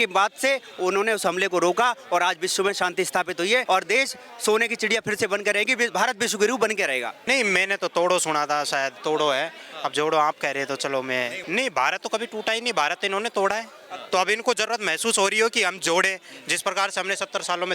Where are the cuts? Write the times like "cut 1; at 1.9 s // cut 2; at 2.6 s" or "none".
cut 1; at 3.6 s // cut 2; at 7.2 s // cut 3; at 11.4 s